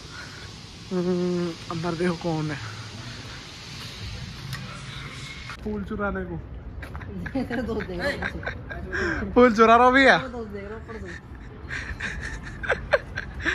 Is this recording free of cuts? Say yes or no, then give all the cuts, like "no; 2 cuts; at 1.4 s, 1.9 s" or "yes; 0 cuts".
no; 1 cut; at 5.5 s